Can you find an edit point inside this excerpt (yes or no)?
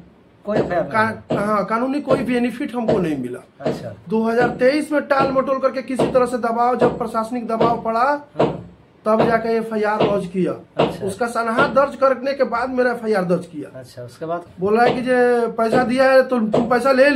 yes